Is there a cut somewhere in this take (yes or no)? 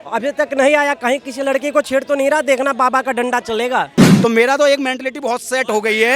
yes